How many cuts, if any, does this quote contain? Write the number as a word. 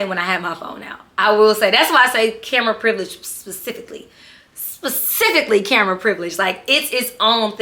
zero